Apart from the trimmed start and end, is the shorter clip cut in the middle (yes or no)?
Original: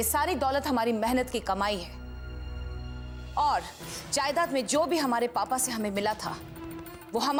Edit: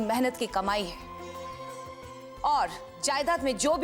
yes